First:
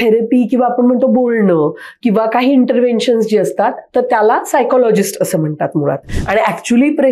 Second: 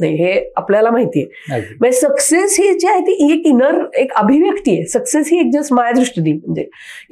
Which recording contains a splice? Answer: first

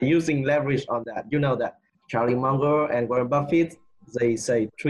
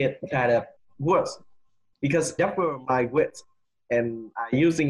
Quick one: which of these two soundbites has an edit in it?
second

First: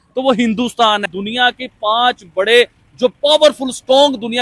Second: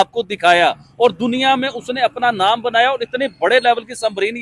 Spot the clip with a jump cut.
first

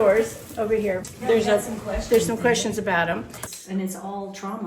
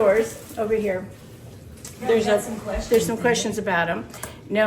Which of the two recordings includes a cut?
first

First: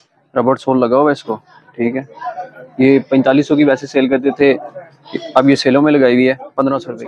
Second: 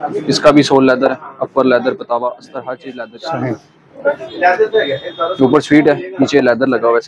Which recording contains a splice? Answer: second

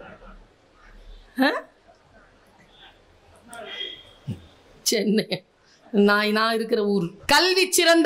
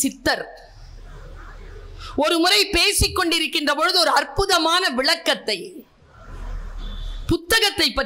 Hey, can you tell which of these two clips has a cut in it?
first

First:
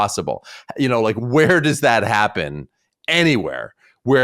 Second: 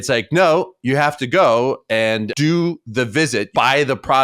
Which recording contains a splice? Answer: second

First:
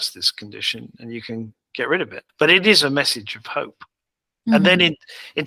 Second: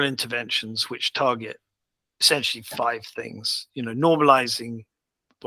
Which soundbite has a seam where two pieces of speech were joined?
first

